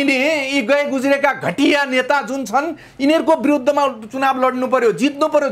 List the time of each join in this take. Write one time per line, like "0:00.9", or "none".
none